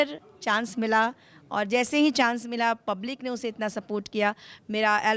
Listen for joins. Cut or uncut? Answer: uncut